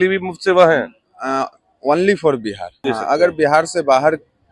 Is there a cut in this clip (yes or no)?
yes